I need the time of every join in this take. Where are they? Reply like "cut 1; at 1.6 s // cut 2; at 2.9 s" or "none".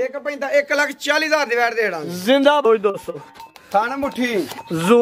cut 1; at 2.6 s